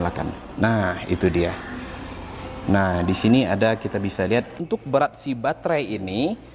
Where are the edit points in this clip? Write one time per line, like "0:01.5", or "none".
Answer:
0:04.6